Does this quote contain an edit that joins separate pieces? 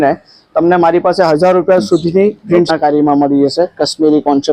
yes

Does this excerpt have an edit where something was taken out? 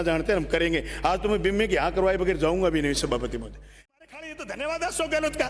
yes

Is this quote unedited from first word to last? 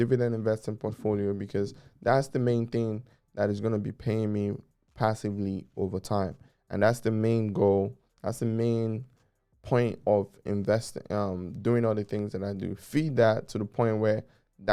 yes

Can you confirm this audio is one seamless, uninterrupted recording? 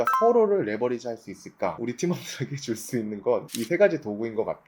no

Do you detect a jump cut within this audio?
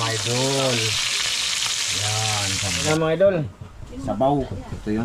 yes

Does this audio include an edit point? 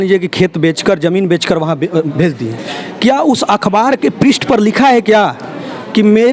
no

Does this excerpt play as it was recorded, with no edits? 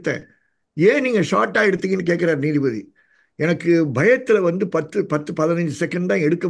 yes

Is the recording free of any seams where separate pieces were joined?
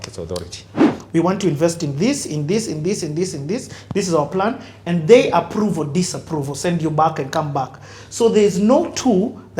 no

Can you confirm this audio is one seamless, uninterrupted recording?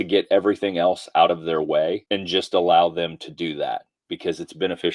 no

